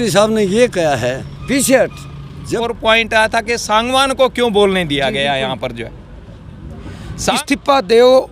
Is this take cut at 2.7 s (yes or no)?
yes